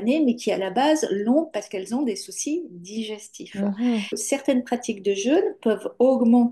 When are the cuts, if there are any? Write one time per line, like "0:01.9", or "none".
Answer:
0:04.2